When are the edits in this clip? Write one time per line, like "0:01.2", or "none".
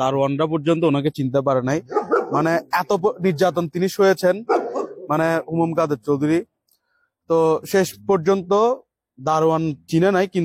none